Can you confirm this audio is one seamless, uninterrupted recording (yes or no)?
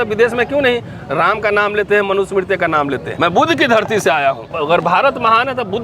no